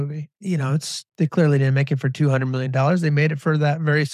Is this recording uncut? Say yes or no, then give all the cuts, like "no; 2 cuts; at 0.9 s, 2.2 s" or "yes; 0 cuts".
no; 1 cut; at 1.0 s